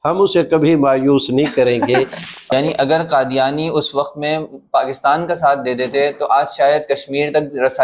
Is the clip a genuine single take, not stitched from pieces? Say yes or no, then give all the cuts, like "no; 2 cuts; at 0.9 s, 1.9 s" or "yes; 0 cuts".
no; 1 cut; at 2.5 s